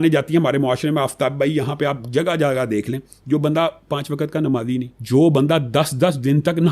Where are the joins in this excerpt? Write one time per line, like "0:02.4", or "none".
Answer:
0:05.0

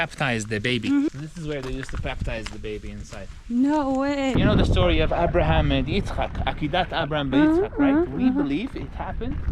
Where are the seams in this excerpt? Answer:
0:01.1
0:04.3

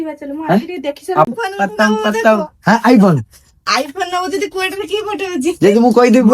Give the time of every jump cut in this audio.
0:01.3

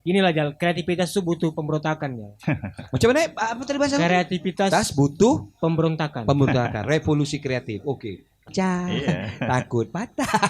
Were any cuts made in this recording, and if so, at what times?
0:08.5

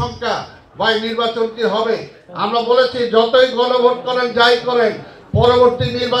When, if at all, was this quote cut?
0:02.3

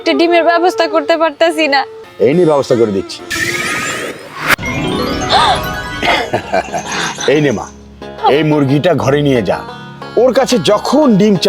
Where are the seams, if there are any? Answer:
0:02.0

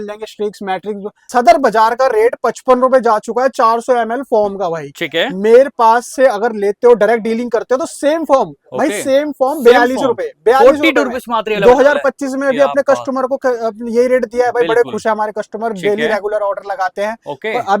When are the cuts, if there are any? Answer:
0:01.1

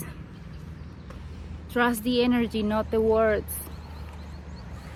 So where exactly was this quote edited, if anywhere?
none

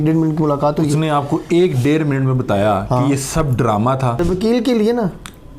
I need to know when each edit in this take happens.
0:04.2

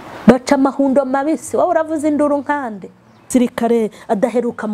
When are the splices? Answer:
0:03.2

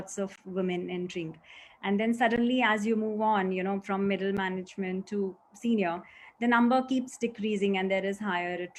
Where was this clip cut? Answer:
none

